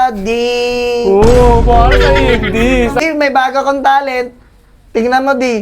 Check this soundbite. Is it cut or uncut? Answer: cut